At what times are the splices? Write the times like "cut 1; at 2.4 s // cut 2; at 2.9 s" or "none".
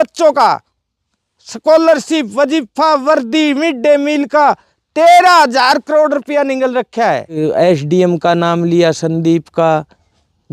cut 1; at 7.4 s